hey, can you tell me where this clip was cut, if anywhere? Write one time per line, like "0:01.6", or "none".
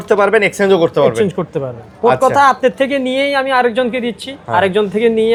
none